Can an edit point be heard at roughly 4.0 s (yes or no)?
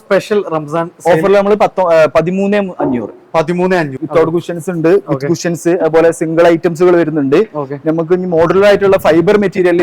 yes